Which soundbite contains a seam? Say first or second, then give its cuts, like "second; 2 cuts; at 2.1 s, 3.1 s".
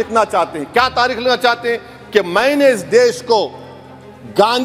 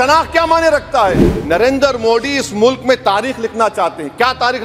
second; 1 cut; at 1.3 s